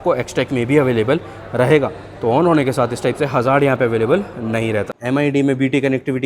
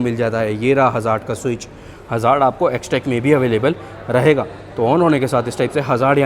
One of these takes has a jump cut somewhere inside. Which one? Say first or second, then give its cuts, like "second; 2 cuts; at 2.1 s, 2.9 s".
first; 1 cut; at 4.9 s